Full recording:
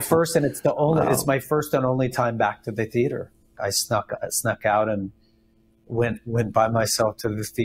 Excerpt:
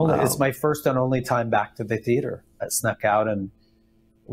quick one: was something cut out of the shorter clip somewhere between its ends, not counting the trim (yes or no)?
yes